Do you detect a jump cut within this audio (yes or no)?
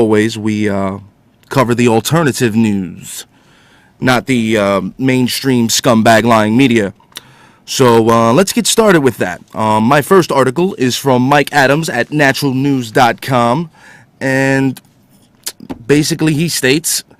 yes